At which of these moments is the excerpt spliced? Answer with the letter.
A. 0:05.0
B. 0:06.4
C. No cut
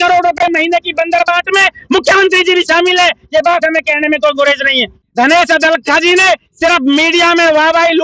A